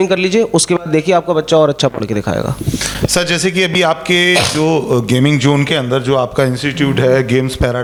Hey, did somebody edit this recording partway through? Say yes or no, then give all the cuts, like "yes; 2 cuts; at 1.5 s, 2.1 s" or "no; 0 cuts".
no; 0 cuts